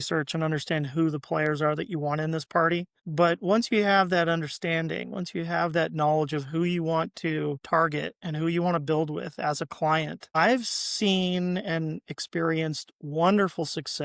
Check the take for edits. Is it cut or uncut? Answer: uncut